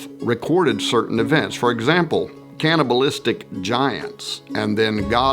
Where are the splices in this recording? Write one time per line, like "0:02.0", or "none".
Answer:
0:02.4